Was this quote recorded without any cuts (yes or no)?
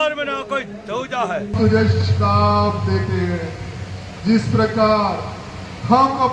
no